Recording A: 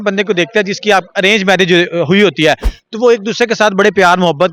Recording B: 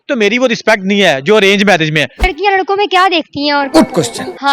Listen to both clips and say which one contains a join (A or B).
B